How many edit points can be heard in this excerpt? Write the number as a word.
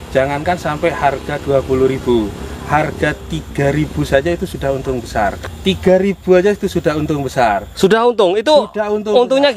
one